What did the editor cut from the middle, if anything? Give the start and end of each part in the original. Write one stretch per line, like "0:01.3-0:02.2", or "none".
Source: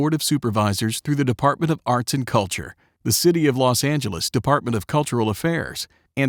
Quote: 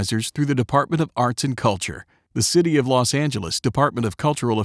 none